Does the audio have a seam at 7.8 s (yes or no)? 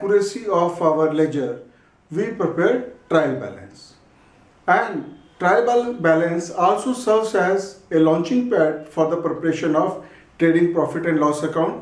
no